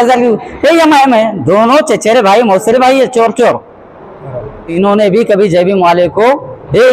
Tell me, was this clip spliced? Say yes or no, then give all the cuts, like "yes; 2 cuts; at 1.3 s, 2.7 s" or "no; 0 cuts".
yes; 1 cut; at 4.7 s